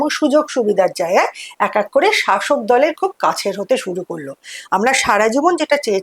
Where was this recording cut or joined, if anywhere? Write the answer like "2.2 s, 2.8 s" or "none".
none